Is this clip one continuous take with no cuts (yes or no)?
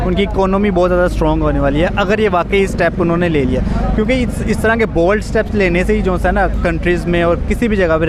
yes